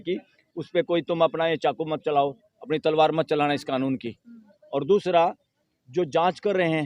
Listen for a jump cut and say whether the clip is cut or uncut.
uncut